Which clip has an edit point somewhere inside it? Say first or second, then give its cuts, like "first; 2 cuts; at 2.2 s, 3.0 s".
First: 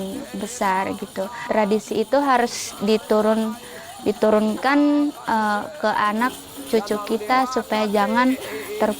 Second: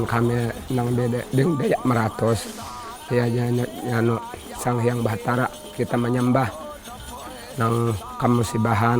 first; 1 cut; at 1.4 s